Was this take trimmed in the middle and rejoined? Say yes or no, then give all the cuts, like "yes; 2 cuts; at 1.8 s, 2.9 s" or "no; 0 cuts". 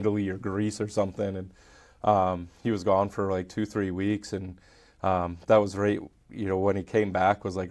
no; 0 cuts